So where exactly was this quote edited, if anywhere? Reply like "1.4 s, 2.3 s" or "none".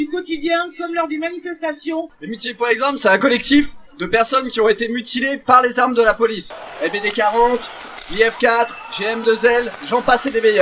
2.2 s